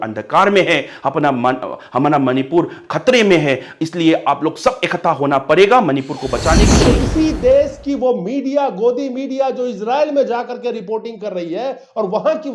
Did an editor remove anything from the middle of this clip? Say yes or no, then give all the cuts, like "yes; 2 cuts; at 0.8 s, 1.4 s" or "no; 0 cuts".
yes; 1 cut; at 6.7 s